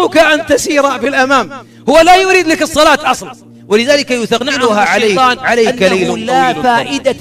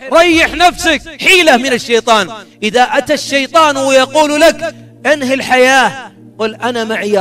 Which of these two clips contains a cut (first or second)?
first